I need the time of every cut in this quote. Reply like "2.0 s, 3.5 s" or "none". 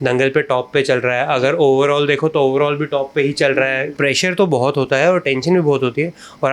3.9 s